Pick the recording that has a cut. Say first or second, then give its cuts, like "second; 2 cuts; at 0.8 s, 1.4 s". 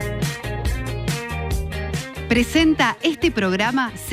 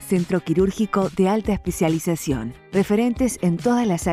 first; 1 cut; at 2.2 s